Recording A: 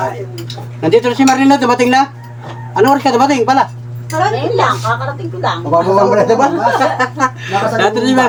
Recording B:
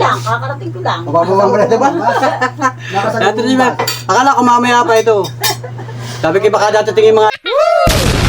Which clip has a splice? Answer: B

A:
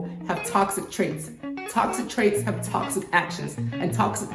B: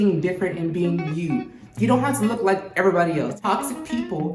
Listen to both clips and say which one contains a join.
B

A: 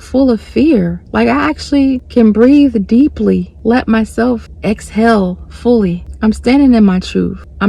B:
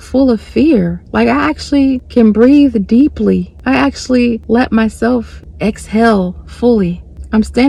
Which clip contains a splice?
A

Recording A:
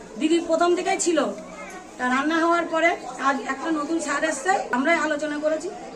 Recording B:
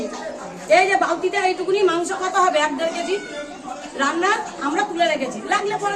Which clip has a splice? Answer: A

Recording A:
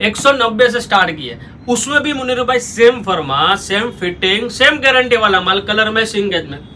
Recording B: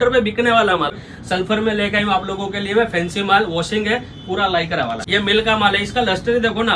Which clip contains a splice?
B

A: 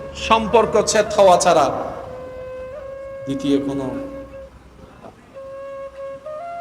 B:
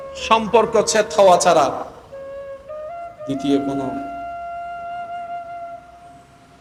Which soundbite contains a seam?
A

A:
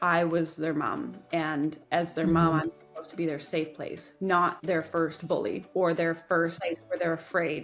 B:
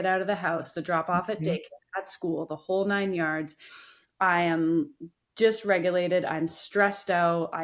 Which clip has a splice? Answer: A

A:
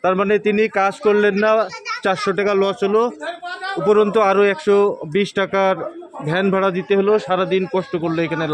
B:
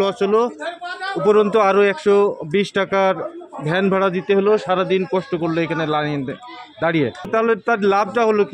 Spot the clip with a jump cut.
B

